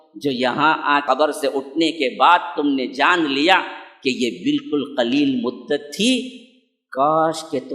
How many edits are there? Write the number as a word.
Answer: one